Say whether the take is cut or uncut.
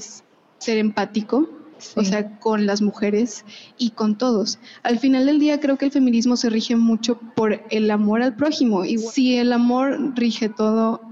cut